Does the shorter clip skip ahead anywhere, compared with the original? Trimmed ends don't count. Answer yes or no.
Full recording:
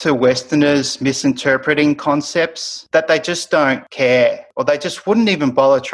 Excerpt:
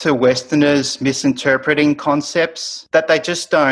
no